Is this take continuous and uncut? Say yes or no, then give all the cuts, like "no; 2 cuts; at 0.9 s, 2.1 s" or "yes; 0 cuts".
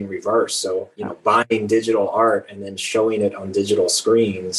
yes; 0 cuts